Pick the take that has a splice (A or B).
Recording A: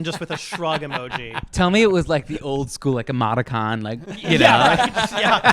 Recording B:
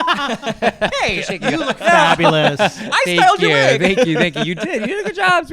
A